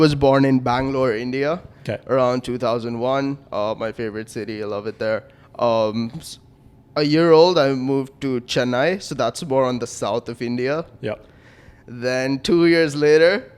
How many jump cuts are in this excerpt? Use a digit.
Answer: 0